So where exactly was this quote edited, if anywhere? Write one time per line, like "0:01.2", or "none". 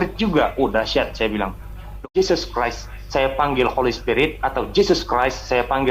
0:02.0